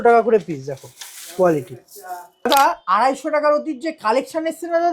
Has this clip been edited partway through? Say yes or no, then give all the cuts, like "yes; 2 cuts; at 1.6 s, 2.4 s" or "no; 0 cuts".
yes; 1 cut; at 2.5 s